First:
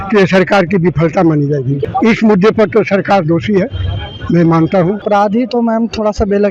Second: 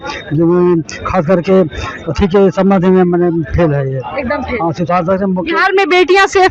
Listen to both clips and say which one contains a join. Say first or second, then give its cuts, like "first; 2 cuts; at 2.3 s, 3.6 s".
first; 2 cuts; at 1.8 s, 5.0 s